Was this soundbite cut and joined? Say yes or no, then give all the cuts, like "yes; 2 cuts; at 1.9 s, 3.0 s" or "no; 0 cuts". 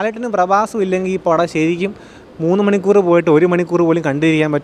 no; 0 cuts